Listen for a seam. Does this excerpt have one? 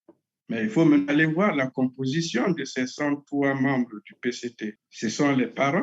yes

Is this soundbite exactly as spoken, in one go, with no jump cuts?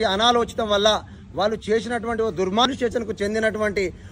no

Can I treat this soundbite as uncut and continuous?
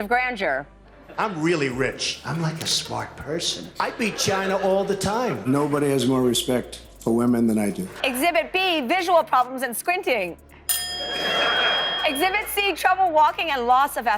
yes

